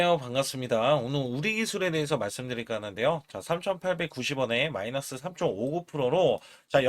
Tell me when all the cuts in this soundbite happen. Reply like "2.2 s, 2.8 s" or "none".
none